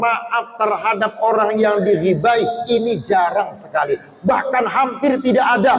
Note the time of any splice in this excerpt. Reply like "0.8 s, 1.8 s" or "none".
none